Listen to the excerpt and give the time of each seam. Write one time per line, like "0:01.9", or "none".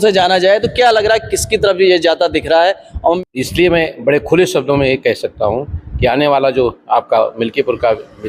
0:03.2